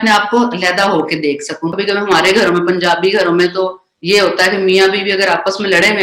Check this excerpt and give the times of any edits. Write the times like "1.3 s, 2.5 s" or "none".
1.7 s